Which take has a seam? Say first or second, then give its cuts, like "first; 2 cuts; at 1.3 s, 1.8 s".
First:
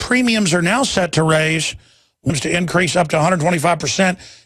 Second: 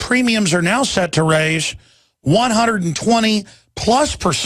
second; 1 cut; at 2.3 s